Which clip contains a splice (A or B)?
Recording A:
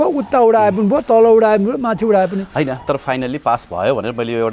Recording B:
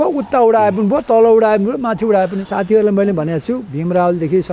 B